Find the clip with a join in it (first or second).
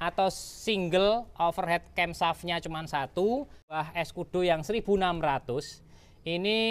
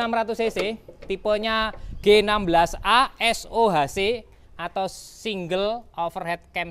first